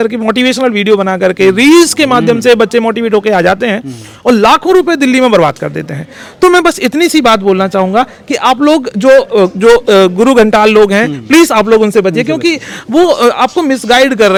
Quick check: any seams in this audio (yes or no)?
no